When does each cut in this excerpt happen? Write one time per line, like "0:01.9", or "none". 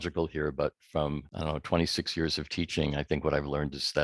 0:01.3